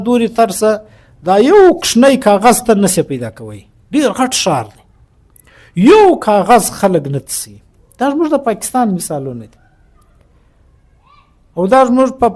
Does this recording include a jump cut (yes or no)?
no